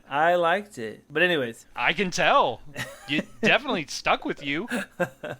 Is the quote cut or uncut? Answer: cut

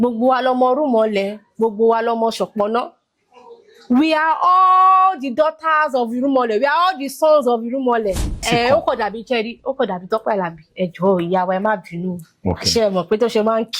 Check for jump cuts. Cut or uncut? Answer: cut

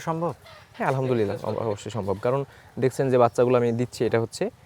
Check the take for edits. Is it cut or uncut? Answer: uncut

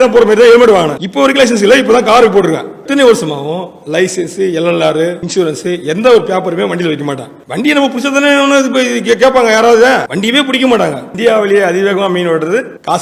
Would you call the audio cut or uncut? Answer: uncut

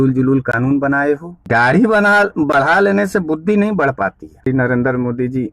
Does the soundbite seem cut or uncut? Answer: cut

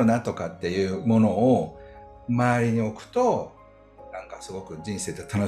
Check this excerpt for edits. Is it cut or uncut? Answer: uncut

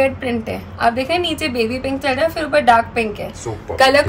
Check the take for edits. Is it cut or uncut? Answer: uncut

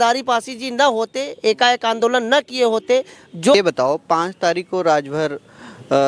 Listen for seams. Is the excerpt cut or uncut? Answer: cut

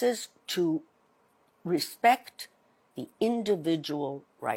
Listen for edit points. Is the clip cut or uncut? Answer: uncut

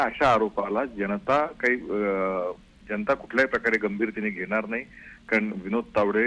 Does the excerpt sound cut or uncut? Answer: uncut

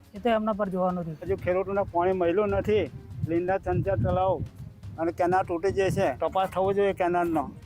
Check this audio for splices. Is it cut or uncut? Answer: cut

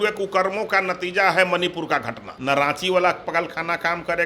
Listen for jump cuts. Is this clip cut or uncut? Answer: cut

